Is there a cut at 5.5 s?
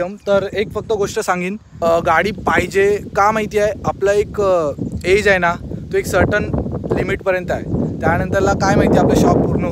no; 1 cut; at 1.7 s

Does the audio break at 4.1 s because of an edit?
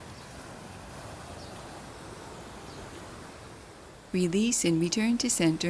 yes; 1 cut; at 4.1 s

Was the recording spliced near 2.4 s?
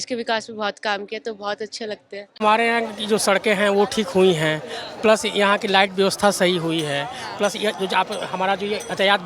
yes; 1 cut; at 2.4 s

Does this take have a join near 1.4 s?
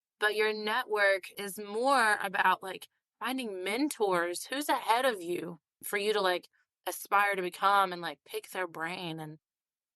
yes; 1 cut; at 1.4 s

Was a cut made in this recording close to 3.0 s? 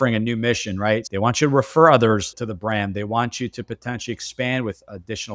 no; 1 cut; at 1.1 s

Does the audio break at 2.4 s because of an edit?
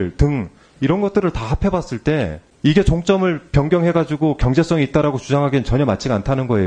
yes; 1 cut; at 2.4 s

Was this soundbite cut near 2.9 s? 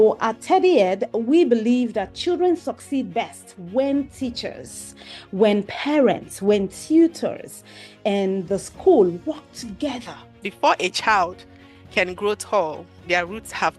no; 1 cut; at 10.4 s

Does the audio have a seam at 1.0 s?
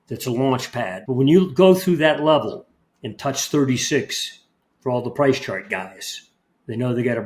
yes; 1 cut; at 1.0 s

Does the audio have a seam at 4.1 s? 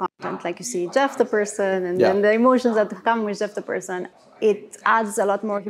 yes; 1 cut; at 4.1 s

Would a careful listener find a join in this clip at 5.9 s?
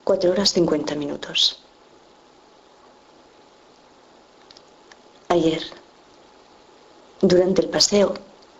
no; 1 cut; at 1.9 s

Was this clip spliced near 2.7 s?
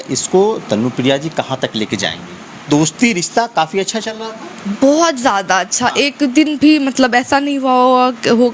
yes; 1 cut; at 2.7 s

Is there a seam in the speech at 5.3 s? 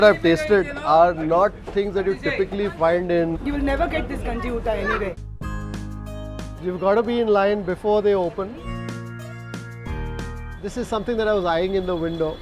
yes; 2 cuts; at 5.3 s, 8.6 s

